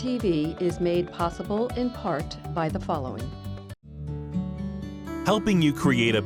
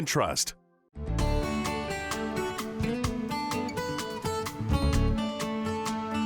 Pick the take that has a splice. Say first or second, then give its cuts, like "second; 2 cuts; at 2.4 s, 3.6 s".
second; 1 cut; at 1.1 s